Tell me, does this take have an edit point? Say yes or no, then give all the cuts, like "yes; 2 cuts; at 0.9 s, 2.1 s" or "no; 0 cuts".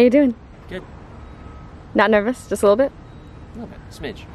no; 0 cuts